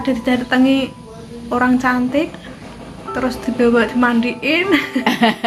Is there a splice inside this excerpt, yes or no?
no